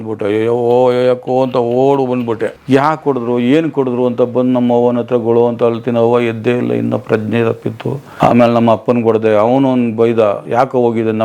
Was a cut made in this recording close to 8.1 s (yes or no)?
yes